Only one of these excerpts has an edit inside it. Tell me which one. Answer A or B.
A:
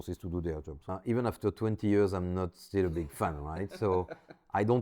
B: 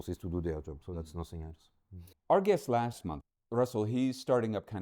A